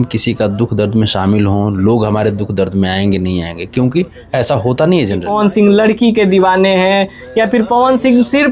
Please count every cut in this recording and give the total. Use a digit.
1